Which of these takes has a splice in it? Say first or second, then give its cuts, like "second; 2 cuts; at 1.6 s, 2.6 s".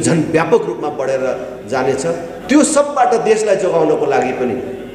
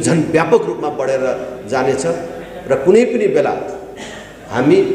first; 1 cut; at 2.3 s